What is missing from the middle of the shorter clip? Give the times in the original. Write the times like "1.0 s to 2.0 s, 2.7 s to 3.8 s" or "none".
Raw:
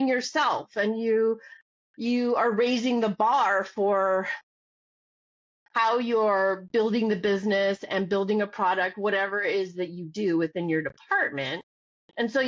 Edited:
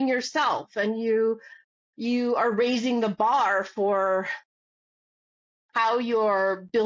none